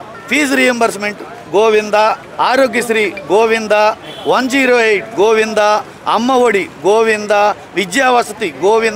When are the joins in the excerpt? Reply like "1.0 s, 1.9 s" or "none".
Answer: none